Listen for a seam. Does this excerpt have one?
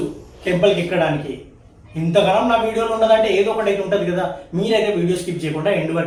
no; 0 cuts

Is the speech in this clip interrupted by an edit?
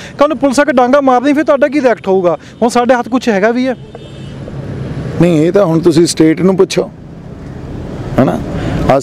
no; 0 cuts

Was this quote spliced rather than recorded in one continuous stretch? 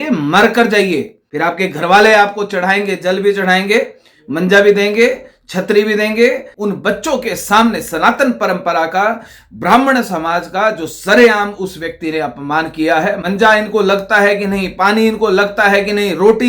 yes; 3 cuts; at 1.2 s, 6.5 s, 13.2 s

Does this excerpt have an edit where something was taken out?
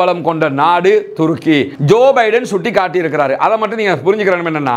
yes; 1 cut; at 1.7 s

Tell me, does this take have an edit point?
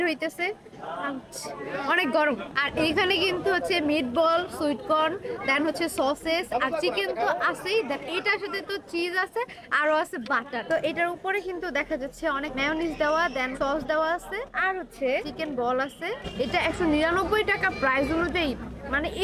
yes; 3 cuts; at 2.5 s, 10.6 s, 16.2 s

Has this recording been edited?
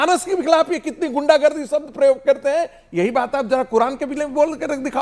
no; 0 cuts

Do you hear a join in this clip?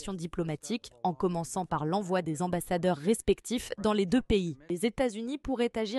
yes; 1 cut; at 4.7 s

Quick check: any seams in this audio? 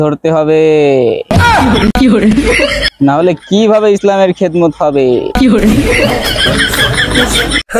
no; 0 cuts

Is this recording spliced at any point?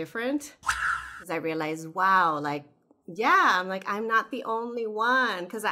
yes; 2 cuts; at 1.1 s, 2.6 s

